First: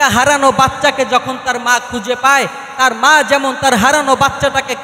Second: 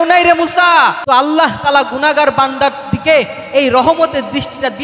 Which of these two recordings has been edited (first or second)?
second